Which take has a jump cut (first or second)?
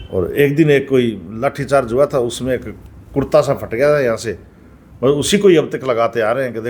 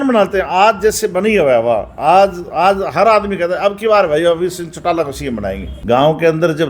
second